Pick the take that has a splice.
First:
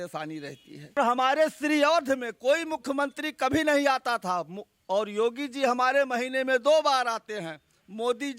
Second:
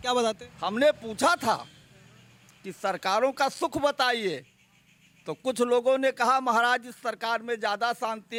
first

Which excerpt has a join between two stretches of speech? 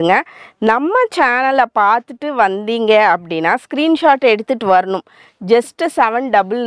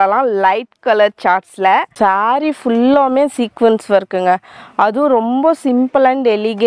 second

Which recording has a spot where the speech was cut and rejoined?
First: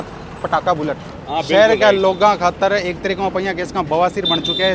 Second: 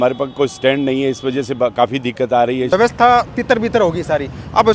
second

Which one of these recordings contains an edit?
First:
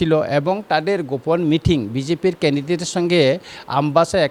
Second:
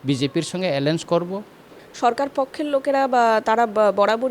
second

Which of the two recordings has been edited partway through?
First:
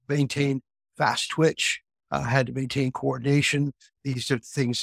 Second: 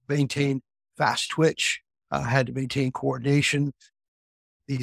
first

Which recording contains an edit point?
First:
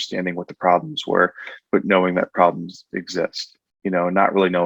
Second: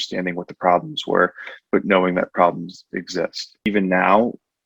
second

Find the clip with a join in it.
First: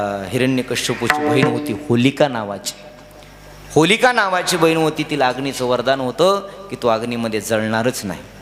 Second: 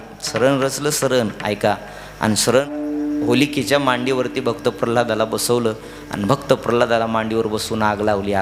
second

